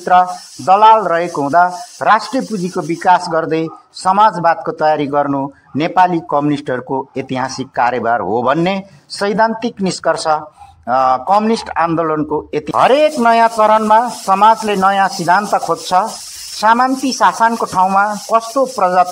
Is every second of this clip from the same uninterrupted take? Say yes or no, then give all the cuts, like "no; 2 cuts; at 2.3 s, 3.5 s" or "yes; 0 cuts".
no; 1 cut; at 12.7 s